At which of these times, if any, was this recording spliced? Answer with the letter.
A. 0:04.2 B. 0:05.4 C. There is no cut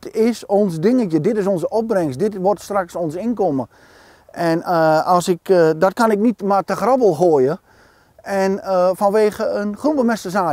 C